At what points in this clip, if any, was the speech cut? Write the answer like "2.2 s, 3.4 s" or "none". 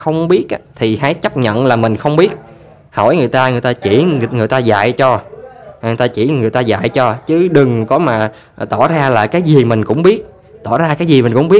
none

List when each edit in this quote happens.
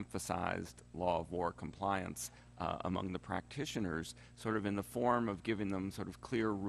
5.8 s

